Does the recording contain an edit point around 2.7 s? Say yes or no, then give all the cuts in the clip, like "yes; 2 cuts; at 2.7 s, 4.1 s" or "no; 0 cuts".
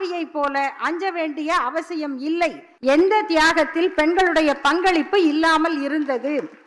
yes; 1 cut; at 2.7 s